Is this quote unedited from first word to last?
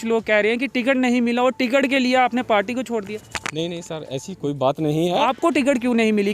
no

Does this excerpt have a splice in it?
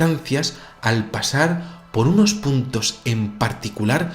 yes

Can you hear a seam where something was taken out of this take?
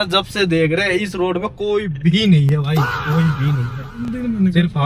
no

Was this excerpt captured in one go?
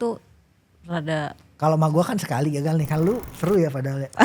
no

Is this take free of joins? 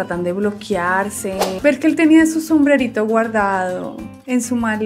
no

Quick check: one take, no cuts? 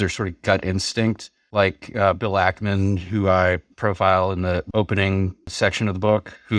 no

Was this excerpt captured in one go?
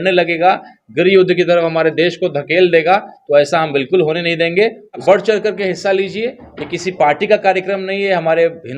no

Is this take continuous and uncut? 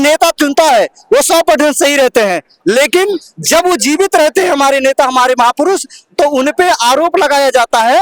yes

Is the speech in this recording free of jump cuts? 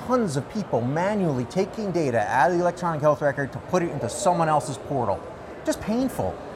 yes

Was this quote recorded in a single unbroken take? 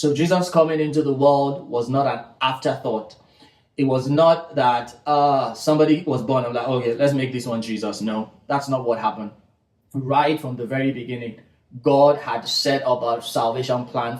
yes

